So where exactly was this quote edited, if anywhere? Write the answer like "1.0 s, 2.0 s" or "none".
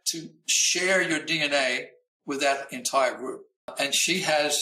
3.7 s